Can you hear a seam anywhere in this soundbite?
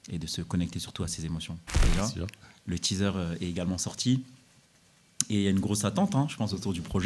yes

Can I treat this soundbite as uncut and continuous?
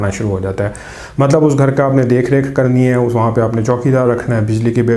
yes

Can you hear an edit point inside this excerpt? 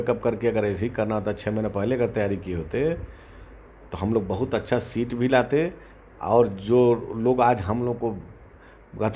no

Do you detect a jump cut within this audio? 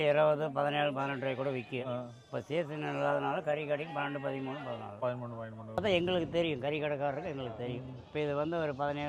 yes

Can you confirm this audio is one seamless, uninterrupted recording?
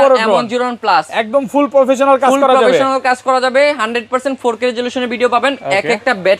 yes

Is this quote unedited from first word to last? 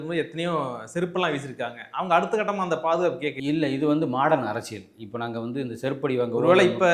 yes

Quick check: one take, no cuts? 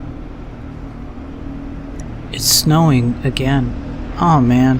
no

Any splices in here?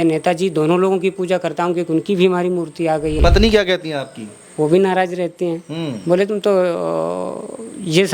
yes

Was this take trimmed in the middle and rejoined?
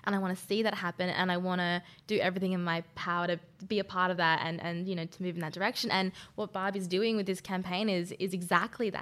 no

